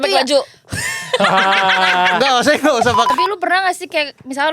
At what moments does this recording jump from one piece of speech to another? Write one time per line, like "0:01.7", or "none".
0:03.1